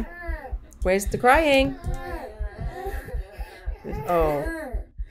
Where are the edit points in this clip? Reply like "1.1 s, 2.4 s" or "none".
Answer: 3.2 s